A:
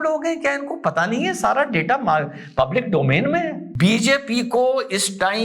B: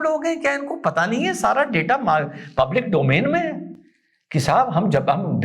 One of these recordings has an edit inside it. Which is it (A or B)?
A